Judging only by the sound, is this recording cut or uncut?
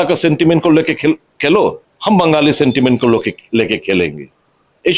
cut